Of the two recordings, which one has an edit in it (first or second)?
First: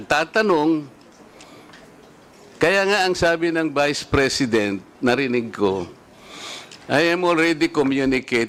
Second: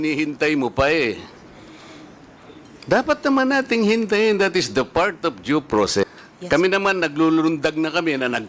second